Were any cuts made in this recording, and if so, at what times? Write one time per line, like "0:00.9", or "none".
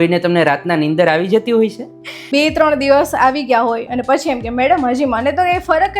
0:02.2